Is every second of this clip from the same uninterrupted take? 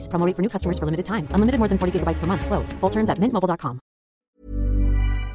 no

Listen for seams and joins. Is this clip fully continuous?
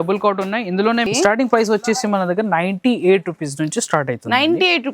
no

